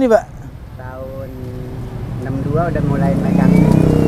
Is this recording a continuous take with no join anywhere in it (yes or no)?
yes